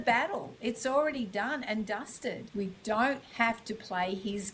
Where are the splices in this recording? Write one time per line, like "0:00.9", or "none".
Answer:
0:02.4